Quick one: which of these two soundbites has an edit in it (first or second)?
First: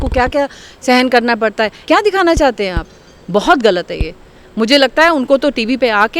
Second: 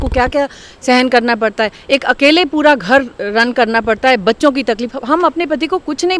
first